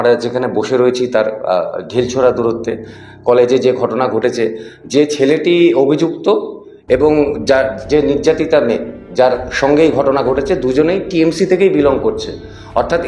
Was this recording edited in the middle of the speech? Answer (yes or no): no